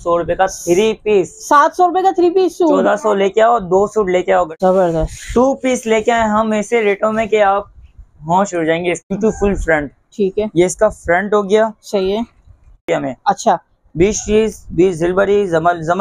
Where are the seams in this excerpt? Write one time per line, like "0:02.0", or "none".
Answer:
0:04.5
0:09.0
0:12.9

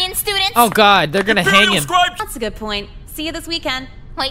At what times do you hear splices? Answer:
0:02.2

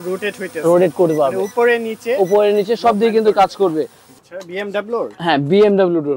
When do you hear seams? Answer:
0:04.0

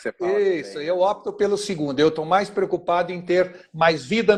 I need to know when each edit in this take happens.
none

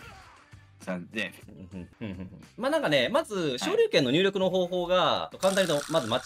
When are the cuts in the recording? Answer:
0:01.9
0:05.3

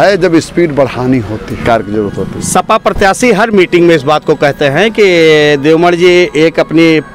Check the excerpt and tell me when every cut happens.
0:01.6

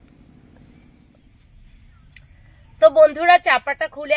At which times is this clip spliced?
0:01.2

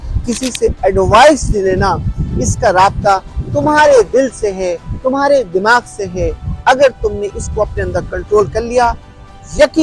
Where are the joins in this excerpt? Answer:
none

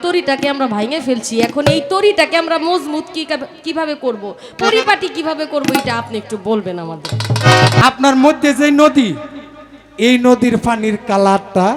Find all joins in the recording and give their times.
0:07.8

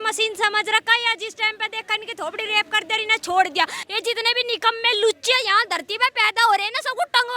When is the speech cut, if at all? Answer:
0:03.7

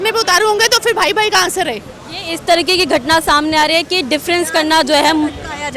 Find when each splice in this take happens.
none

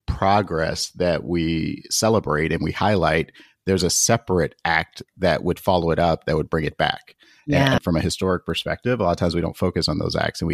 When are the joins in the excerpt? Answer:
0:07.8

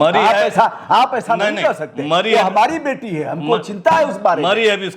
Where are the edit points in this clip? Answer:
none

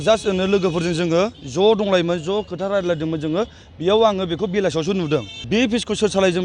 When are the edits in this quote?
0:05.4

